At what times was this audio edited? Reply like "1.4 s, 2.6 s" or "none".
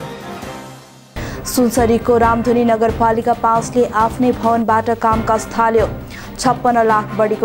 1.0 s